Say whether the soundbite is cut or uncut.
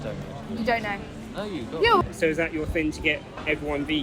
cut